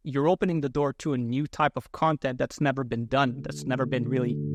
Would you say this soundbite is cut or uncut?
uncut